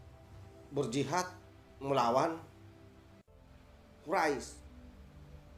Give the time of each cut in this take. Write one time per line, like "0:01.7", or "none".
0:04.5